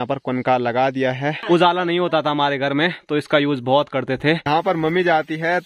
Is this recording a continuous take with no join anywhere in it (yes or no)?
no